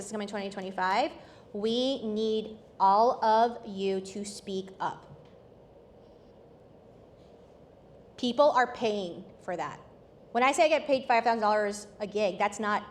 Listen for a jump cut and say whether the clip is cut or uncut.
uncut